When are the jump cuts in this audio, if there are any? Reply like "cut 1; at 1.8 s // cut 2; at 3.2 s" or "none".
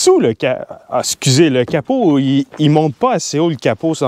none